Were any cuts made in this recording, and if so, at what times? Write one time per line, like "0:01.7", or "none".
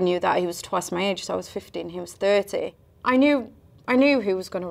0:02.8